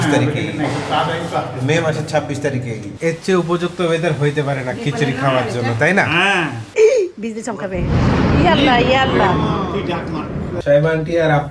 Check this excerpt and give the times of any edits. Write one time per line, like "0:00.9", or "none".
0:03.0
0:06.7
0:10.6